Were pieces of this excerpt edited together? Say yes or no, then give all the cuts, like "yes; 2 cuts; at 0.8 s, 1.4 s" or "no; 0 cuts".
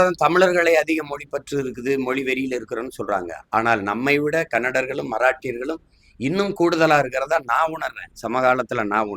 no; 0 cuts